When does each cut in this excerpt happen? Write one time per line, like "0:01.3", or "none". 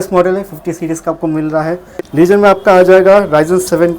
0:01.9